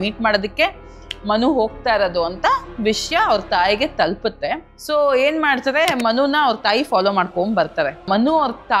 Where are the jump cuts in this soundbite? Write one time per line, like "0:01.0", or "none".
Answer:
0:04.7
0:08.0